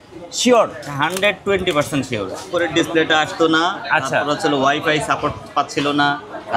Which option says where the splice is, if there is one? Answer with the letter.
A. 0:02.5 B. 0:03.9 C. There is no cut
A